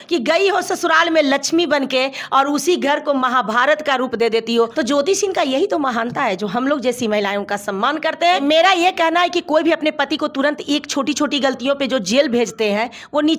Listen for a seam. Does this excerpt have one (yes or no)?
yes